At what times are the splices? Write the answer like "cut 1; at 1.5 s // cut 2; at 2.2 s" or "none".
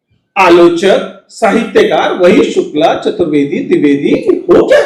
none